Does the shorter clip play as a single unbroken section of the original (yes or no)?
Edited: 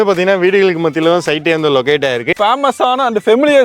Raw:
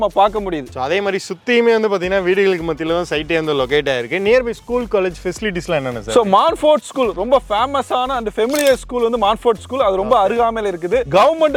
no